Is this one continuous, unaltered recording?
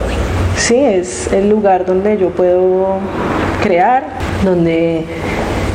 no; 1 cut; at 4.2 s

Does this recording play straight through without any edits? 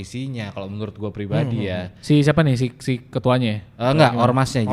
yes; 0 cuts

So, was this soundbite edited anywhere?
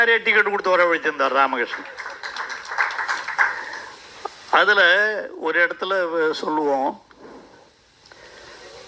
no; 0 cuts

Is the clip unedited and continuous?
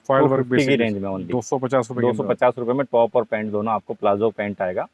yes; 0 cuts

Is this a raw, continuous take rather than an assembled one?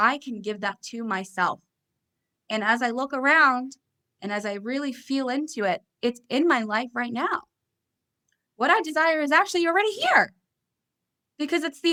yes; 0 cuts

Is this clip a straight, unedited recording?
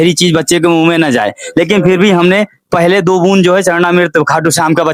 yes; 0 cuts

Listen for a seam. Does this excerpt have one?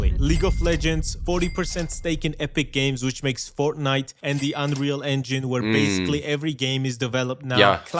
no; 0 cuts

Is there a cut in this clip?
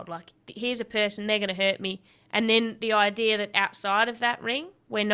no; 0 cuts

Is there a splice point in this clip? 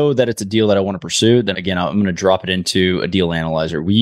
no; 0 cuts

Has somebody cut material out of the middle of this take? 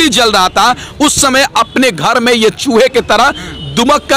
no; 0 cuts

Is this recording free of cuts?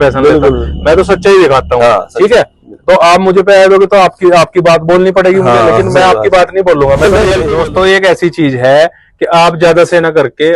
no; 1 cut; at 7.5 s

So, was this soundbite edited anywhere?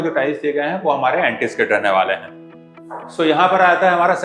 yes; 1 cut; at 2.4 s

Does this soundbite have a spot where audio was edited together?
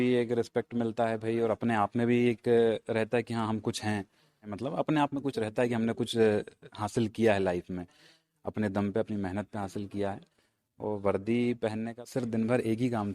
yes; 2 cuts; at 4.5 s, 11.9 s

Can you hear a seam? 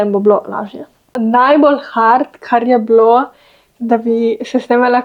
yes; 1 cut; at 1.1 s

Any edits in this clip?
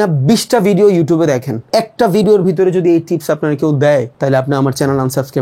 yes; 2 cuts; at 1.5 s, 4.1 s

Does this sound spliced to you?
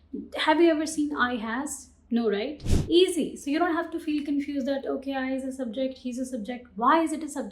yes; 1 cut; at 2.6 s

